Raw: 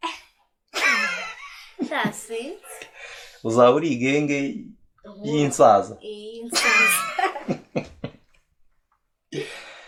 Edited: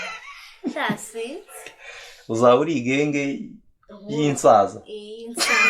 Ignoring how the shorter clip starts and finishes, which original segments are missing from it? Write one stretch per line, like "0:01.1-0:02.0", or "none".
none